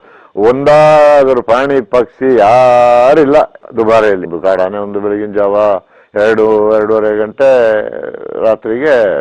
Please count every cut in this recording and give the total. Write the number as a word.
one